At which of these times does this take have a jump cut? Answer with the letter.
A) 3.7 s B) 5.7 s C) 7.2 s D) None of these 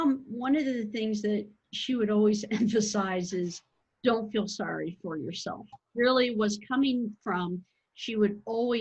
B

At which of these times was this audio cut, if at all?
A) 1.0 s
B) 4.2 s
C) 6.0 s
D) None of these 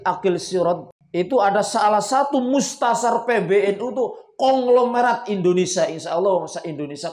A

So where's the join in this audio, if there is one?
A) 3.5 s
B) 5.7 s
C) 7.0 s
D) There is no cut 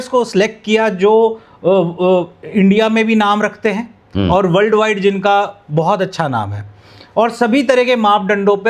D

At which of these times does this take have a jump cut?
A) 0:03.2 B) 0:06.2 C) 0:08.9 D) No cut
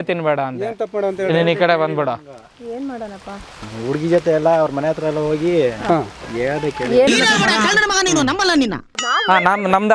C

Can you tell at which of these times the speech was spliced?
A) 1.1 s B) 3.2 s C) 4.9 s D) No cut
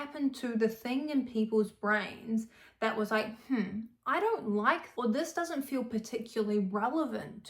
C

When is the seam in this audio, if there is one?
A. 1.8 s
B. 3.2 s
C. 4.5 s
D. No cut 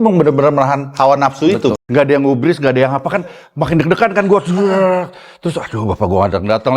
A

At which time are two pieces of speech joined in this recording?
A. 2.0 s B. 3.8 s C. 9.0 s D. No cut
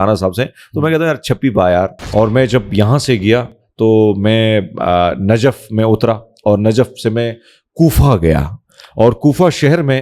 A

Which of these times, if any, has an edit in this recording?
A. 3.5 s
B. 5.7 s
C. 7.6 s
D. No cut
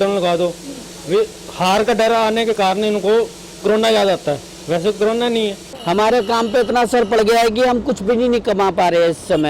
B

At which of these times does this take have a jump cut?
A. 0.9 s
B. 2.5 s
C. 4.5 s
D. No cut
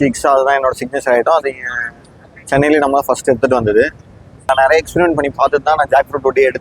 C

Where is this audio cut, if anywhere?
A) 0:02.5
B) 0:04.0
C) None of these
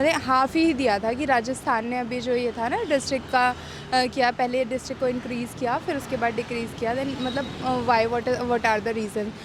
C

